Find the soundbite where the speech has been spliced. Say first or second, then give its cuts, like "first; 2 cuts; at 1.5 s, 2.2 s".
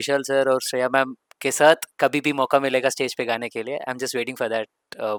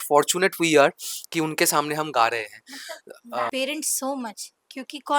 second; 1 cut; at 3.4 s